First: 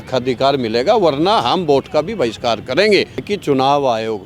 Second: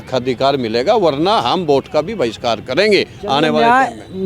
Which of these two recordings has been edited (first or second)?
first